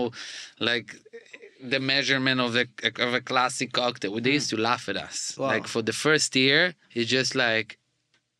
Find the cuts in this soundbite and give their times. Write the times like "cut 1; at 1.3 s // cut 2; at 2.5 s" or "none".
cut 1; at 6.8 s